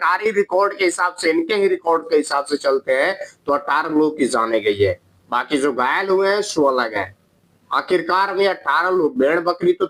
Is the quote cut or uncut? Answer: uncut